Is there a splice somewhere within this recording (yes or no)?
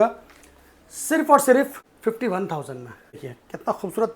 yes